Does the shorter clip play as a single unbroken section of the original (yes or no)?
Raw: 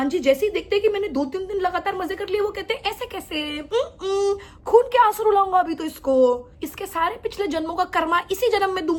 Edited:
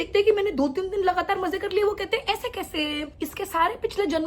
no